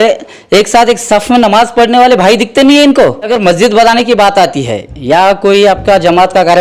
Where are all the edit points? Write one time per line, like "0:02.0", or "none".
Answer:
0:03.3